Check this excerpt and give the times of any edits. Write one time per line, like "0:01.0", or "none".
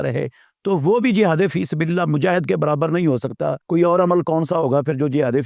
0:03.6